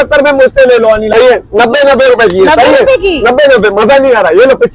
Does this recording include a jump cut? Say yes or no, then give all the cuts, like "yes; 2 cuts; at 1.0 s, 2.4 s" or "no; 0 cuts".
yes; 1 cut; at 1.1 s